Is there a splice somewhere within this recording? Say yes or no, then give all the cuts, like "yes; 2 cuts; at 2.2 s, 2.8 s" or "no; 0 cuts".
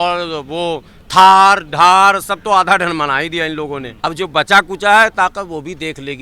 yes; 1 cut; at 3.9 s